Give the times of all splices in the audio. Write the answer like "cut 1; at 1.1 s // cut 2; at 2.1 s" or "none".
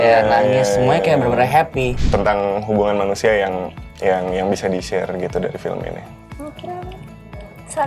cut 1; at 2.0 s

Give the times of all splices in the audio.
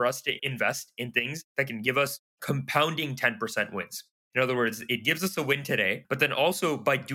none

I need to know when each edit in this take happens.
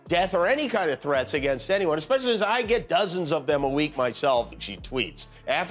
cut 1; at 4.5 s

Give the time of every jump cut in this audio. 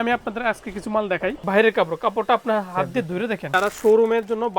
cut 1; at 1.4 s // cut 2; at 3.5 s

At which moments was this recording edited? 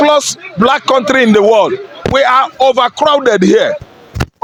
none

